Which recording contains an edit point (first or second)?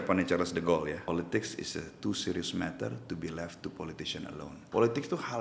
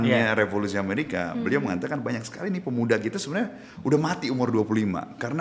first